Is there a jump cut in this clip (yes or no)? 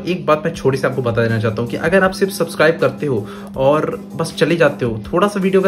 no